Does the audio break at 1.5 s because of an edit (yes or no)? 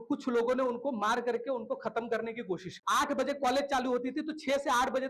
no